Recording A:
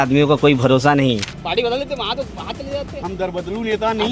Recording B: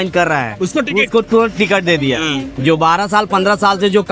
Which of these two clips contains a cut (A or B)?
A